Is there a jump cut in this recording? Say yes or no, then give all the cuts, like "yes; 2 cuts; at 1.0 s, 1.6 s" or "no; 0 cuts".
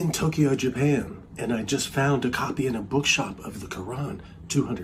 no; 0 cuts